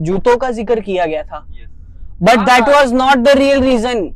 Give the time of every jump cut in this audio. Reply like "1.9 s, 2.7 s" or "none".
none